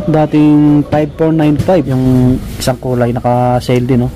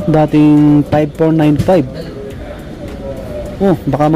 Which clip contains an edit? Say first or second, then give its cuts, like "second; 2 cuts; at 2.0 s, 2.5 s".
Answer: first; 1 cut; at 1.9 s